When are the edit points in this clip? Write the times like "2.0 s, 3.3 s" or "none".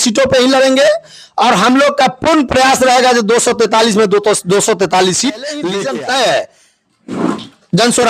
5.7 s